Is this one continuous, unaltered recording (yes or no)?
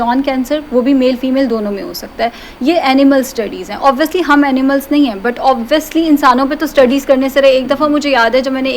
yes